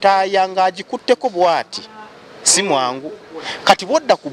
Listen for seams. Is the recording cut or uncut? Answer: uncut